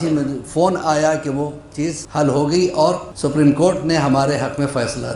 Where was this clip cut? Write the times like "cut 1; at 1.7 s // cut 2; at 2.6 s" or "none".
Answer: cut 1; at 2.0 s // cut 2; at 3.1 s